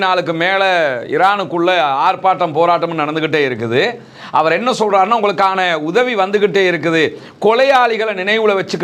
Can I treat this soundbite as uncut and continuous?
yes; 0 cuts

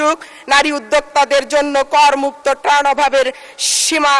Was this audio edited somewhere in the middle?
no; 0 cuts

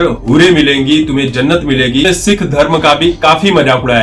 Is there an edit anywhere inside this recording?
yes; 1 cut; at 2.0 s

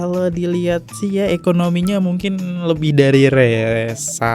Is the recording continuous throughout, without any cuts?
yes; 0 cuts

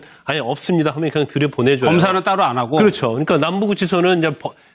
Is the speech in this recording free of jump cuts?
yes; 0 cuts

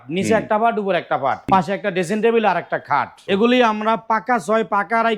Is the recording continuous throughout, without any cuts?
no; 2 cuts; at 1.5 s, 3.2 s

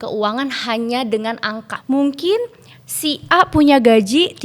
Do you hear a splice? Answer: yes; 1 cut; at 1.7 s

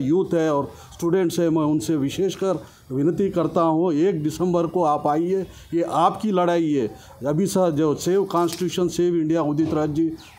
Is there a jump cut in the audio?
no; 0 cuts

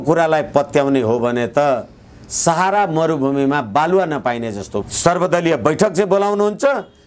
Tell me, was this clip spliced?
yes; 1 cut; at 4.7 s

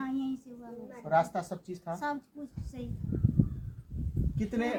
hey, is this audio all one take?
yes; 0 cuts

